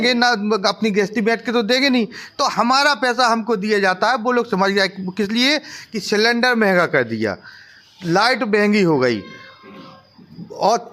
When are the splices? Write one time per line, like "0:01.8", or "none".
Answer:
none